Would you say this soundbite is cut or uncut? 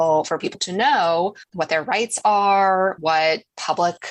uncut